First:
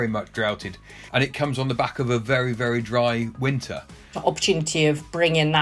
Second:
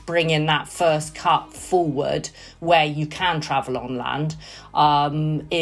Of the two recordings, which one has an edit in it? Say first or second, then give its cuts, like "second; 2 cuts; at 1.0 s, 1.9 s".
first; 2 cuts; at 0.9 s, 4.1 s